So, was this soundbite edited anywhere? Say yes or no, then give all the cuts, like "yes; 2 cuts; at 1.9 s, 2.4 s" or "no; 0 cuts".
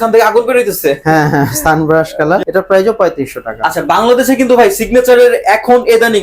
yes; 2 cuts; at 2.4 s, 3.5 s